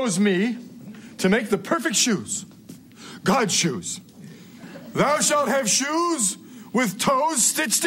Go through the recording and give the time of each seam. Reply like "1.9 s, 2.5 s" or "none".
4.6 s